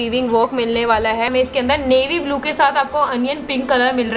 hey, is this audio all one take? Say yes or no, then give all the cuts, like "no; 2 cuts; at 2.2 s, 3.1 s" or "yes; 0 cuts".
no; 1 cut; at 1.3 s